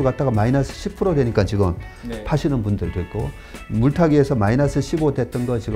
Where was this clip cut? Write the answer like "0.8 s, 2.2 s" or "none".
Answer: none